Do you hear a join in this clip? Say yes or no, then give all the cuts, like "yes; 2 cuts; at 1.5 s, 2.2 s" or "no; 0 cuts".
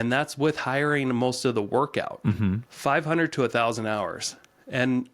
yes; 1 cut; at 2.7 s